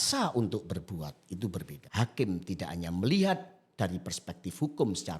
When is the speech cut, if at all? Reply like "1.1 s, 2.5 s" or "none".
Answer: 1.8 s